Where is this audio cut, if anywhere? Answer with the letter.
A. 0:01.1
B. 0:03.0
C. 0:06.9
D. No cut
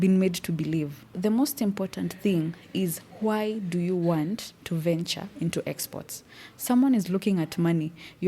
A